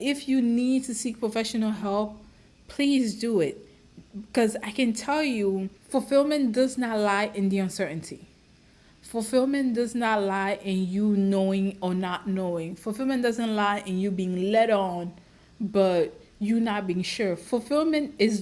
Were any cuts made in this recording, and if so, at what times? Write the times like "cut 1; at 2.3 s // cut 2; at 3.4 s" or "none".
cut 1; at 5.8 s